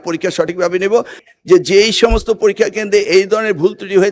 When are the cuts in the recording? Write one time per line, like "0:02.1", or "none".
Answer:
0:01.2